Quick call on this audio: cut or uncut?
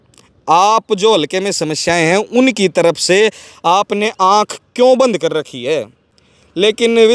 uncut